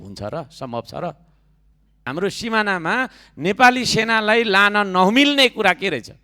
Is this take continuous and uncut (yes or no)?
no